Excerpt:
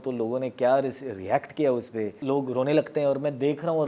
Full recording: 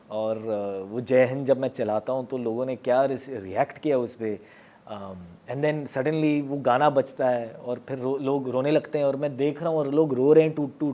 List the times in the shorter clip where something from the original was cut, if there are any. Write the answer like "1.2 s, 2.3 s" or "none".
2.2 s